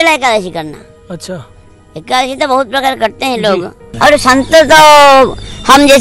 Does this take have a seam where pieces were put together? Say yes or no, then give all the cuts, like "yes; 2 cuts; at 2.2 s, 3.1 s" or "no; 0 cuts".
yes; 1 cut; at 3.8 s